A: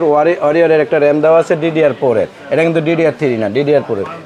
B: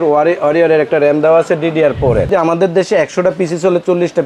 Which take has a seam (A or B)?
B